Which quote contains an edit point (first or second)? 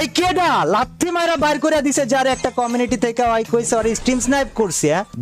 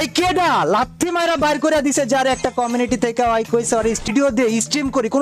second